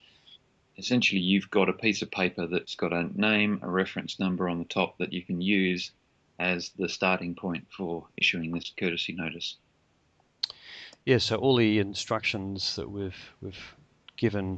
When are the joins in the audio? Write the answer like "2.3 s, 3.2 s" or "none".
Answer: none